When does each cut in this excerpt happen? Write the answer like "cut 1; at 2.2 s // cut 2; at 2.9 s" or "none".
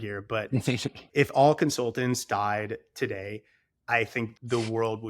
cut 1; at 1.0 s // cut 2; at 4.3 s